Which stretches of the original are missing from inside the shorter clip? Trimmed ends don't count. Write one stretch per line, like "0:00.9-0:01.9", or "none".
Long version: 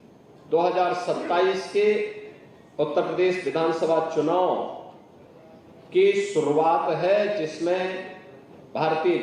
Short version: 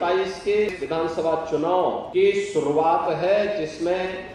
0:02.1-0:03.4
0:04.7-0:05.8